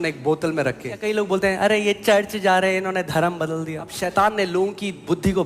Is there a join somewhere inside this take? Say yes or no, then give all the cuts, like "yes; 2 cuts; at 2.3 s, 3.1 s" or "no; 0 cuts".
yes; 2 cuts; at 1.0 s, 4.0 s